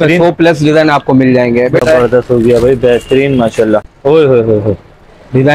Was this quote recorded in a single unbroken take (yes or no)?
no